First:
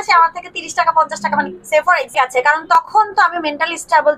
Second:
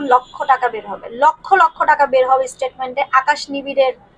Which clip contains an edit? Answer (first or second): first